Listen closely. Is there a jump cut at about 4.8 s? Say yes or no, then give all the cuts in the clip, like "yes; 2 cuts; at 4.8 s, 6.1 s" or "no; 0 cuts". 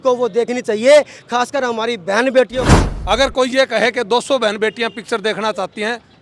no; 1 cut; at 2.5 s